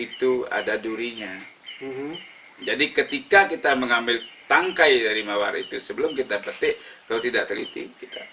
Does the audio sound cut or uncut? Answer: uncut